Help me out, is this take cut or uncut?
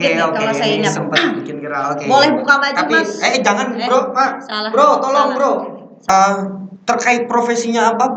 cut